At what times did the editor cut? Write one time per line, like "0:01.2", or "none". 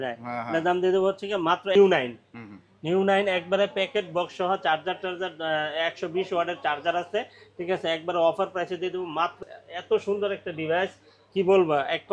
0:01.7
0:09.4